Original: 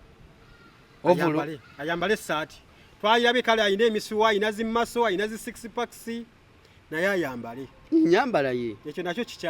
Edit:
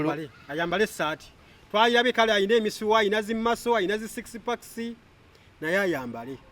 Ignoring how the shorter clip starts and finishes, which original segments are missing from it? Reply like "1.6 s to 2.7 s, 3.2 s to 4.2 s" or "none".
none